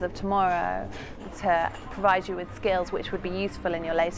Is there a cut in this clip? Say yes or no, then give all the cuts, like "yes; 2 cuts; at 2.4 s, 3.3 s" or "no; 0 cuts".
yes; 1 cut; at 1.2 s